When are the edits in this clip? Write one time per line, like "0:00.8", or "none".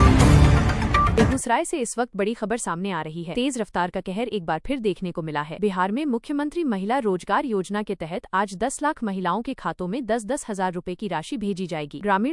0:01.1